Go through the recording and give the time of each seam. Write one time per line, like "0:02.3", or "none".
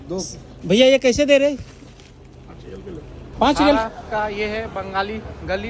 0:03.8